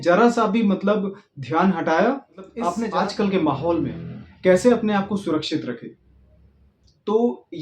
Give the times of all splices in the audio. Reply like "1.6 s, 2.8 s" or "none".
2.8 s